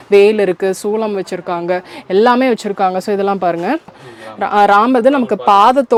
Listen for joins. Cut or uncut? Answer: uncut